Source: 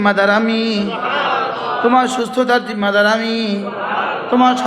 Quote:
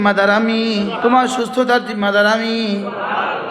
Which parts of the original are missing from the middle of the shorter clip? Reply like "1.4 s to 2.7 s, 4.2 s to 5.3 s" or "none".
1.0 s to 1.8 s